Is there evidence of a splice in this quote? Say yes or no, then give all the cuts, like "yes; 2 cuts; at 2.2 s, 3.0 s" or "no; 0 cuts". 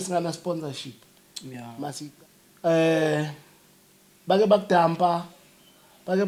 yes; 1 cut; at 2.1 s